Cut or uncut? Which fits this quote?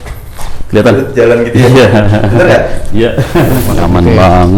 cut